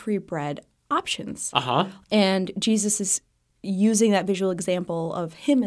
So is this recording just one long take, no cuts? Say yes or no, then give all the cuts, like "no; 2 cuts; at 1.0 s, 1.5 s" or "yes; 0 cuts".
no; 1 cut; at 1.9 s